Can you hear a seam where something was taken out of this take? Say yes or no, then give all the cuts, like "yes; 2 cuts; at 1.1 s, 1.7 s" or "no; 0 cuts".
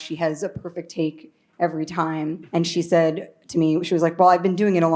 yes; 1 cut; at 2.4 s